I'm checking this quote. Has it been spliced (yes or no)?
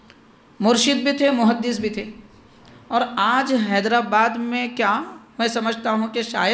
no